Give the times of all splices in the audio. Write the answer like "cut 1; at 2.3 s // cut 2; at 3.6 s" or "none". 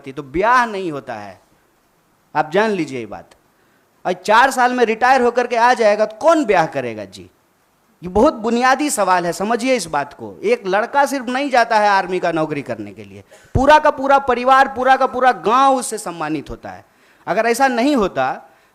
none

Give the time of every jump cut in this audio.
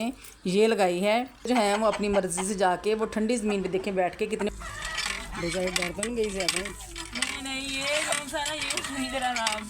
cut 1; at 1.5 s // cut 2; at 4.5 s

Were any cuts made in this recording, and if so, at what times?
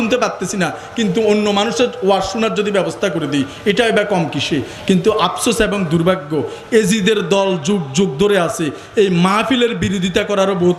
none

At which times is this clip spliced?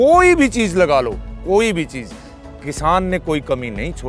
none

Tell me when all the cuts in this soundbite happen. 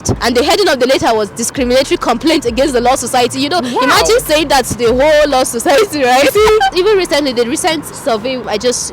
cut 1; at 6.7 s

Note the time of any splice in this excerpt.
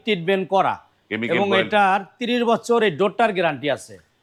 none

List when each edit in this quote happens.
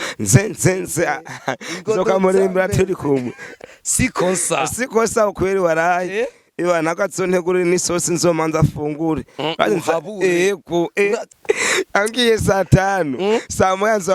cut 1; at 3.5 s // cut 2; at 11.3 s

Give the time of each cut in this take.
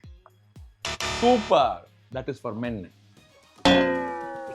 cut 1; at 3.5 s

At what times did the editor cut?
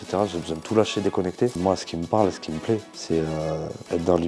cut 1; at 1.6 s // cut 2; at 2.9 s

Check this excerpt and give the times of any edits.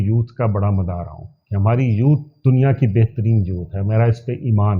none

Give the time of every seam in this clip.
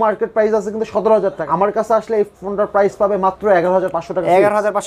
cut 1; at 1.4 s

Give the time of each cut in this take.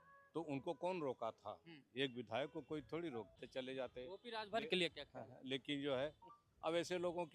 cut 1; at 3.4 s

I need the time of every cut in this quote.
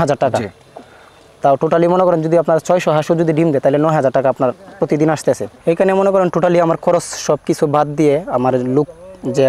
cut 1; at 5.5 s

